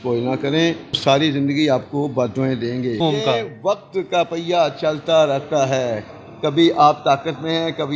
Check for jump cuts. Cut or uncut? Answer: cut